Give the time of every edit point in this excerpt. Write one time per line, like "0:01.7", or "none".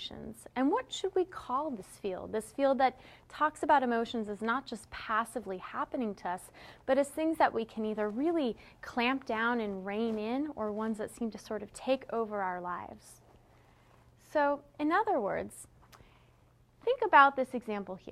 0:04.6